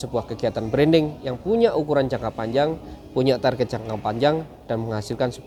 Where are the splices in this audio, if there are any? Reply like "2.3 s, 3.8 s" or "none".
none

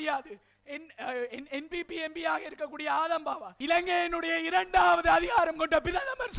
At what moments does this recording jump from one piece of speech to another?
3.5 s

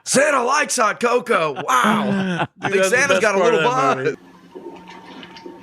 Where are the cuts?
4.1 s

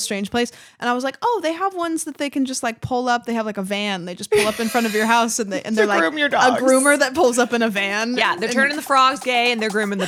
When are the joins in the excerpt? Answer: none

